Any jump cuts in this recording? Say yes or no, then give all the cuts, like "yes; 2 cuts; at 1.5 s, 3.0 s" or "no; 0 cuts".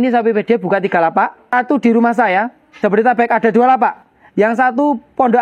yes; 2 cuts; at 1.5 s, 2.8 s